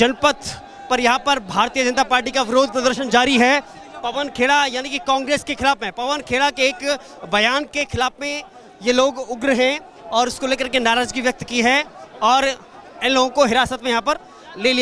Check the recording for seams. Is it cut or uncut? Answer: uncut